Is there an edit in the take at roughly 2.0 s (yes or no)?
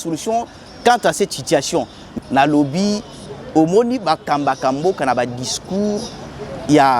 yes